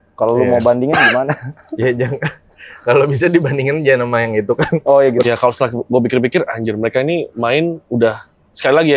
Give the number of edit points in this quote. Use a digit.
1